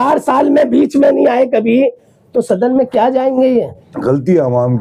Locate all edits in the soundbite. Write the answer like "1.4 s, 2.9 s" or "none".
3.8 s